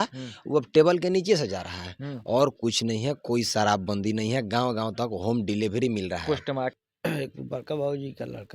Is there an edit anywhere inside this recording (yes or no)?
yes